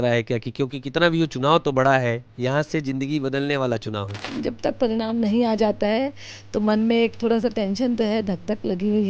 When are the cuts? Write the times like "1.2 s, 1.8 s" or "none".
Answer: 4.3 s

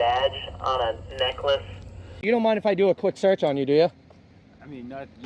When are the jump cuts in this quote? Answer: 2.2 s

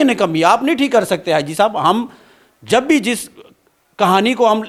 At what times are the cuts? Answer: none

